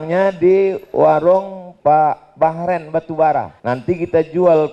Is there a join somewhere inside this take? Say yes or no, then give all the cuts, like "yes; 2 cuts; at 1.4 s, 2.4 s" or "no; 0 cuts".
yes; 2 cuts; at 1.6 s, 3.5 s